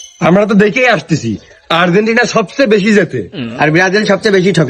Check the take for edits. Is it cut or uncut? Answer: cut